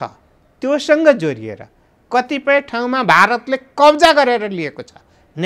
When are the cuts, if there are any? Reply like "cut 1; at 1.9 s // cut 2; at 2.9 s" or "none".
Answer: none